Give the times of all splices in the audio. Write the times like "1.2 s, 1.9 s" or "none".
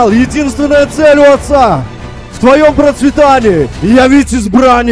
none